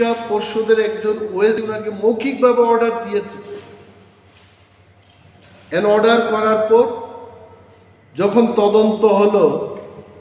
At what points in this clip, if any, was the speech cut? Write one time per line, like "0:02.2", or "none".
0:01.6